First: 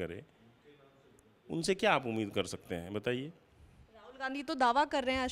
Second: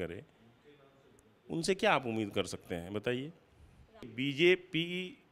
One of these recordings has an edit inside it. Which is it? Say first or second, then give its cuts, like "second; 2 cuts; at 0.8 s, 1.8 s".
second; 1 cut; at 4.1 s